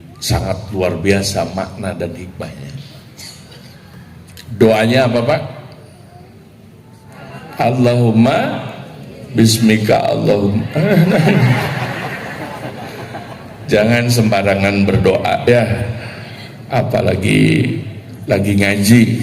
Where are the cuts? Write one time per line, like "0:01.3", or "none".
0:07.1